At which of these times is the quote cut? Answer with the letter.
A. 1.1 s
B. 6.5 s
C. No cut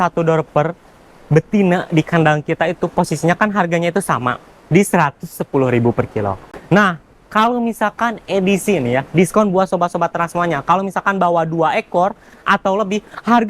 B